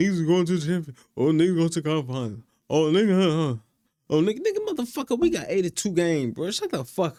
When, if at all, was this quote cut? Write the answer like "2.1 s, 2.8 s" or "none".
none